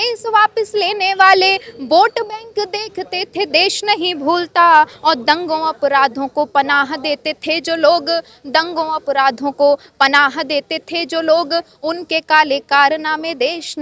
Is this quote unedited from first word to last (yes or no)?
yes